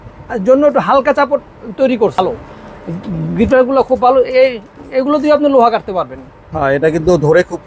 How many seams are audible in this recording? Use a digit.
1